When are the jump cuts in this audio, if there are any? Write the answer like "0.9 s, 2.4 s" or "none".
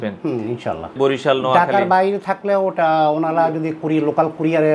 0.9 s